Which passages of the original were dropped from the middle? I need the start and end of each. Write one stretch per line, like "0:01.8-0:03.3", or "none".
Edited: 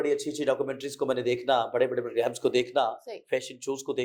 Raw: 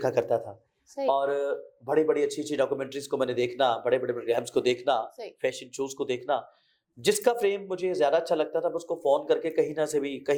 none